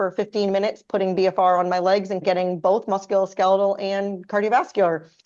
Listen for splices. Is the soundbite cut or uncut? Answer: uncut